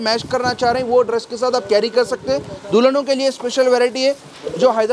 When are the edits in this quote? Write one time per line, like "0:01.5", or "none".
none